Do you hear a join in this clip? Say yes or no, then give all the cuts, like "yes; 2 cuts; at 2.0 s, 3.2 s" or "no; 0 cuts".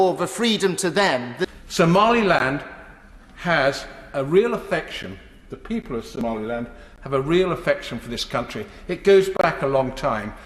yes; 1 cut; at 1.5 s